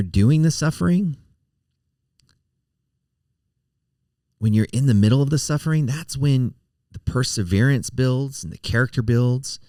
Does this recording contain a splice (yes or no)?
no